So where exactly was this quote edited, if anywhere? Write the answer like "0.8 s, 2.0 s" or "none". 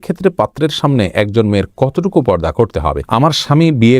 3.0 s